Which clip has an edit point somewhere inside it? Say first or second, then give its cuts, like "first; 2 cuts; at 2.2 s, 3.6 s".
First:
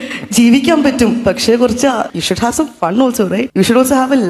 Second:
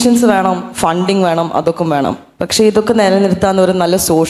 first; 2 cuts; at 2.1 s, 3.5 s